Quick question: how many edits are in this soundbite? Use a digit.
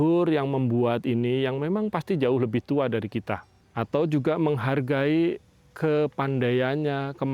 1